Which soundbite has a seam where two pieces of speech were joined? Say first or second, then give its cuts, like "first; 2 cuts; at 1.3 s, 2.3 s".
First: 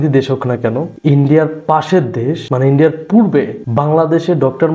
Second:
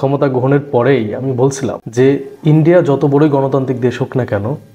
first; 3 cuts; at 0.9 s, 2.4 s, 3.6 s